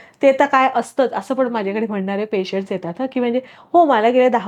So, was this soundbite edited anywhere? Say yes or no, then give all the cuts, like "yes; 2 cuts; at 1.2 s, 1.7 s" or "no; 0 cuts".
no; 0 cuts